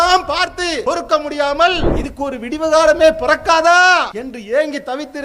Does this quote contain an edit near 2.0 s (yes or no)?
yes